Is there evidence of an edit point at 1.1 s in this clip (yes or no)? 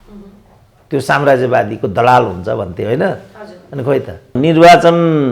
no